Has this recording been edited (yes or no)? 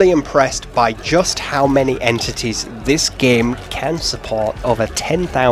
yes